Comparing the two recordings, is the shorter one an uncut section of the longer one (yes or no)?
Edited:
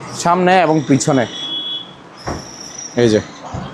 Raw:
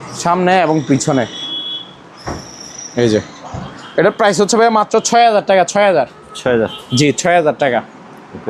yes